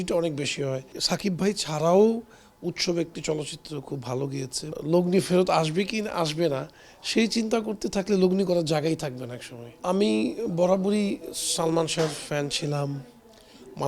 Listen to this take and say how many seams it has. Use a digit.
3